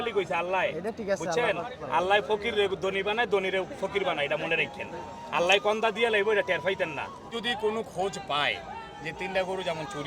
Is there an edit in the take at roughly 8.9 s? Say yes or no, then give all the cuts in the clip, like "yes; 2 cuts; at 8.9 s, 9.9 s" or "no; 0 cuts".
no; 1 cut; at 7.3 s